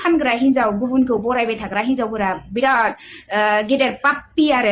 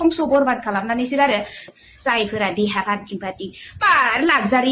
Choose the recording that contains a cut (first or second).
second